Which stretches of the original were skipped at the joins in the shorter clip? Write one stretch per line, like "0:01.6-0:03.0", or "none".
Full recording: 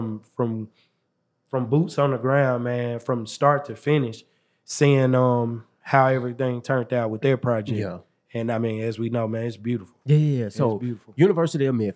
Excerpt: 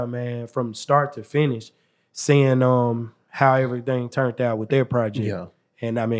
none